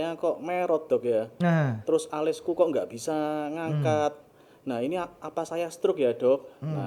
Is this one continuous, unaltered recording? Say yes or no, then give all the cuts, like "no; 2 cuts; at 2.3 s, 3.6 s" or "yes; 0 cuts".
yes; 0 cuts